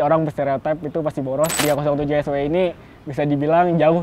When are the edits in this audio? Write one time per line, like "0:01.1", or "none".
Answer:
0:01.6